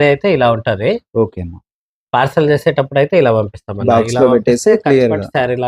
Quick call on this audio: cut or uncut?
uncut